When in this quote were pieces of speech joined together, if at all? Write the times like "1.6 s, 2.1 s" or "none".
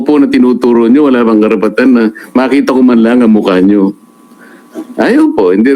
none